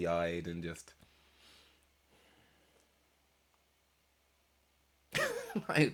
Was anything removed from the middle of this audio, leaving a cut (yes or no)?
no